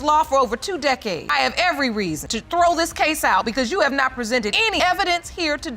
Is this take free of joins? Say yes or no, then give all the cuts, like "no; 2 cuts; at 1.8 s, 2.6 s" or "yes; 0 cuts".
no; 3 cuts; at 1.3 s, 2.3 s, 4.6 s